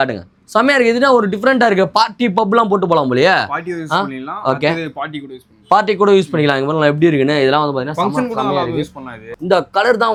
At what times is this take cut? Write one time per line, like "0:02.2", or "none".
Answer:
none